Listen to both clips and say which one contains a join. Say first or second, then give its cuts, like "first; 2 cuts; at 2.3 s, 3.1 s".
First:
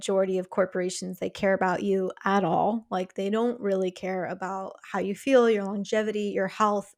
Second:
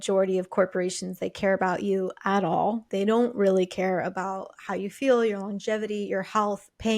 second; 1 cut; at 2.9 s